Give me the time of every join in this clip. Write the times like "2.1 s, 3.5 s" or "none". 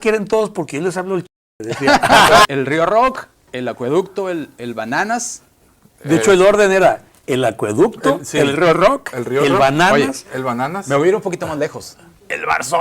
2.5 s